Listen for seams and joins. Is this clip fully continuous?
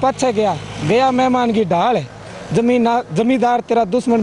yes; 0 cuts

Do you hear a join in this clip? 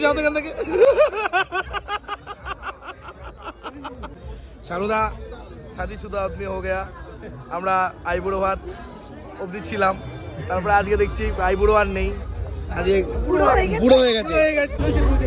no; 0 cuts

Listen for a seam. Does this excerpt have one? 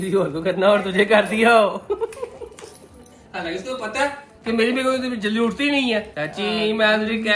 no; 0 cuts

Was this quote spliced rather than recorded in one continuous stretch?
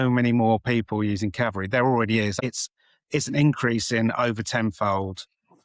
yes; 1 cut; at 2.3 s

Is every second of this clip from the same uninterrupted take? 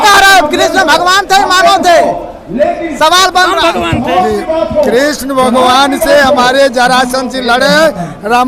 yes; 0 cuts

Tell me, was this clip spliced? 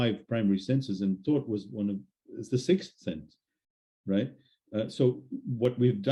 no; 0 cuts

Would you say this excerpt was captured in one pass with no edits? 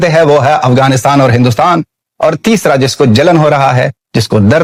yes; 0 cuts

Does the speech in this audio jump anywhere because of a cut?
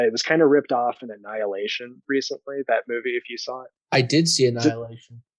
no; 0 cuts

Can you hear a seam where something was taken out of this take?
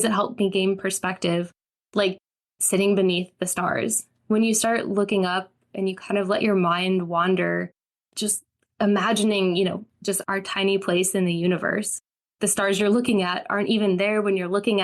yes; 1 cut; at 9.8 s

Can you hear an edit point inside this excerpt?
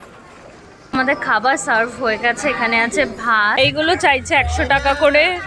yes; 2 cuts; at 0.9 s, 3.6 s

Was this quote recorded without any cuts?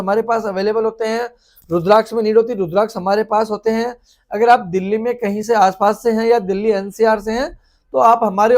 yes; 0 cuts

